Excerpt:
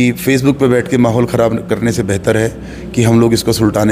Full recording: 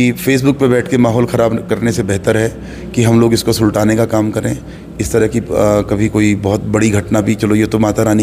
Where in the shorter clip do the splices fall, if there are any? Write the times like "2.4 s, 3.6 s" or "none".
none